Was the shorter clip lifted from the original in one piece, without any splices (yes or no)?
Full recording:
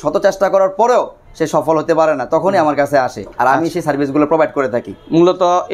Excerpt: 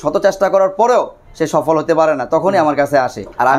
yes